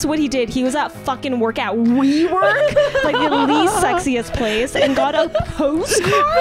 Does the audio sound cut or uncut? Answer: uncut